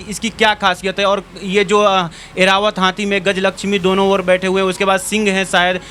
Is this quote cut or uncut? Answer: uncut